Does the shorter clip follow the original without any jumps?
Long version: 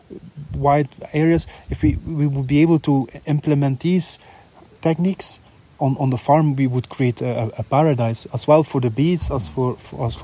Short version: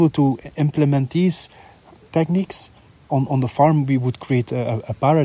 yes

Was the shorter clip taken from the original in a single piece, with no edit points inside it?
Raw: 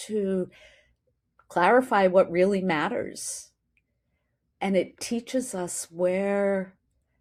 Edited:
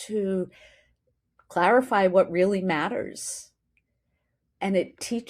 yes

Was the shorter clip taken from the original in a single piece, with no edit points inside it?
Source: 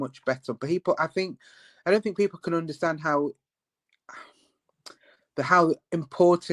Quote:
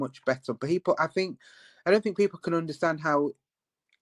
yes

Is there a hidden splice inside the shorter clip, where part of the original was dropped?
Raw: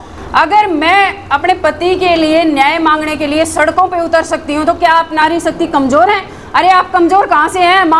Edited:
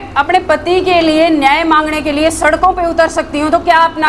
no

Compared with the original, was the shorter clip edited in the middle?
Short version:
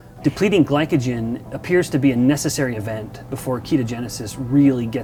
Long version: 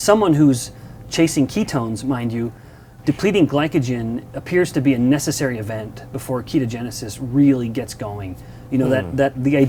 no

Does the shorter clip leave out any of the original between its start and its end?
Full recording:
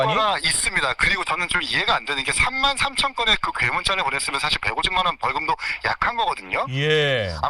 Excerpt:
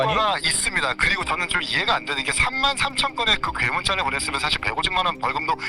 no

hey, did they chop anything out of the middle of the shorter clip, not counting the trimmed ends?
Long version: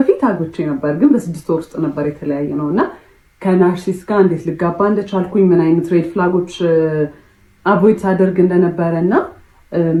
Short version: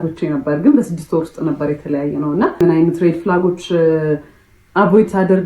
yes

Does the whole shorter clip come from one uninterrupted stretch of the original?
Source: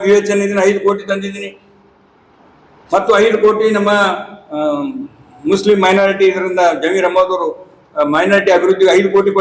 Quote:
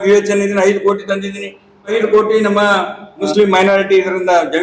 no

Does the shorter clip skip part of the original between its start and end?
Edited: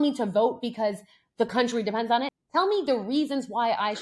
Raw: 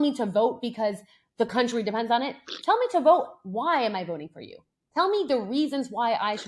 yes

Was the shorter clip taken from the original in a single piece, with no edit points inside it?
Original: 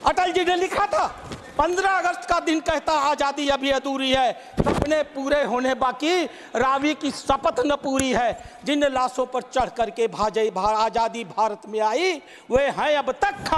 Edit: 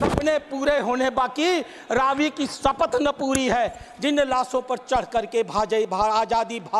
yes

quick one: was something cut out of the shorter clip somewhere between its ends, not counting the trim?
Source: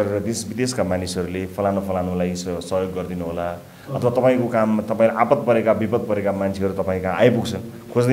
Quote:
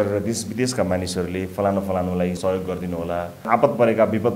yes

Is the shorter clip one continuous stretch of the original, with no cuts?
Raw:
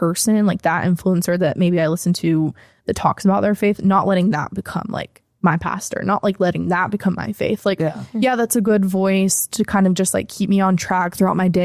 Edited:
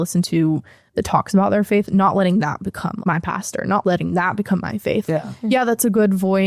no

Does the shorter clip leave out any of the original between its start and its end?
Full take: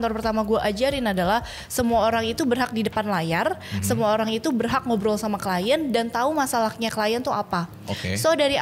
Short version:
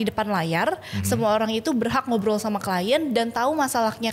no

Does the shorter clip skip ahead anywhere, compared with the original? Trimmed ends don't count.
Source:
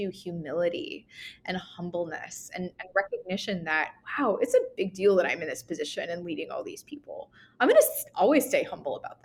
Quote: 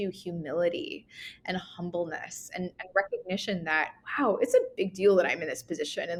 no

